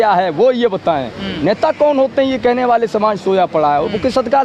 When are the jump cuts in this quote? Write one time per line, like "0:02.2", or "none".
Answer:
none